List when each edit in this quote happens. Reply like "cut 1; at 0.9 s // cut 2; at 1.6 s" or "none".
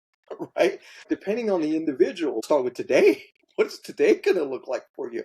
cut 1; at 1.1 s // cut 2; at 2.4 s